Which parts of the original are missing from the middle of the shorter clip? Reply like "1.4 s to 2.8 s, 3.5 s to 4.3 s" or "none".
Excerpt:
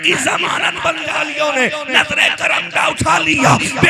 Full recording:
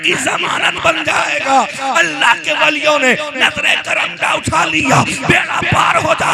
1.1 s to 2.6 s